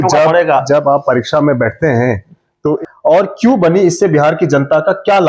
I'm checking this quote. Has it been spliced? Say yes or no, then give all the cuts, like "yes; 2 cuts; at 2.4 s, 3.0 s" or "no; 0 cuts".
yes; 1 cut; at 2.8 s